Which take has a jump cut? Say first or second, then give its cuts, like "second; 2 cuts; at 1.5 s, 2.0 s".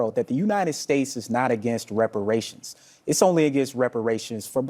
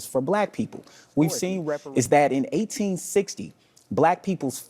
second; 1 cut; at 1.6 s